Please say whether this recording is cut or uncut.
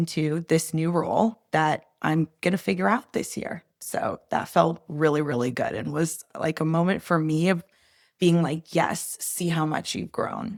uncut